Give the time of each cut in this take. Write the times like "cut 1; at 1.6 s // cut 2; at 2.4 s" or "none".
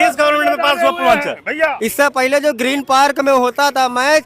cut 1; at 1.8 s